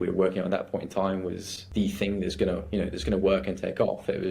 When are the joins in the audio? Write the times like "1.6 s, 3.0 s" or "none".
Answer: 1.5 s